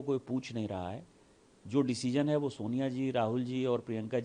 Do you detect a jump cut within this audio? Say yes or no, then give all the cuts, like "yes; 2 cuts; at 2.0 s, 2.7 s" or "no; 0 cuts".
no; 0 cuts